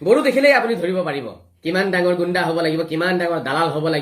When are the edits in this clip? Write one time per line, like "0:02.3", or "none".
0:01.5